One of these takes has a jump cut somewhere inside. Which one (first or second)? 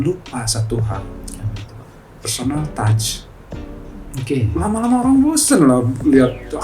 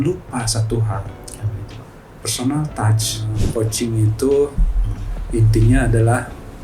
second